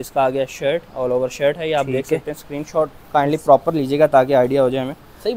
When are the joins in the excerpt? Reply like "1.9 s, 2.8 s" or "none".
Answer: none